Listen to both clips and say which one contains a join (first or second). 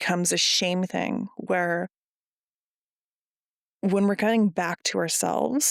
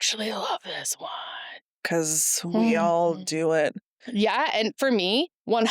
second